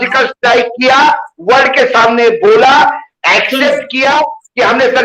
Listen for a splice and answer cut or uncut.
uncut